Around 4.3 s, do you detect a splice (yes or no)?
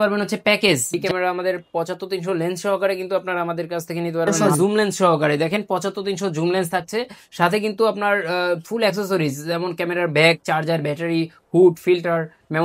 yes